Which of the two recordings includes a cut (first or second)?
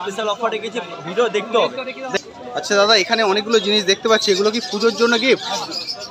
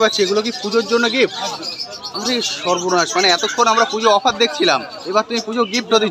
first